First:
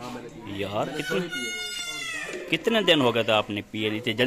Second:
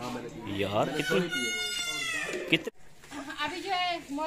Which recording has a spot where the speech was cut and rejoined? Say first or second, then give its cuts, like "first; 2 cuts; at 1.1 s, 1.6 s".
second; 1 cut; at 2.6 s